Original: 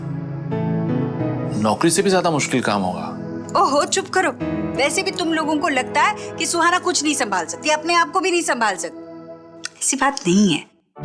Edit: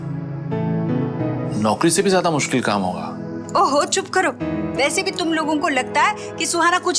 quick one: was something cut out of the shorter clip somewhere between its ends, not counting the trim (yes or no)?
no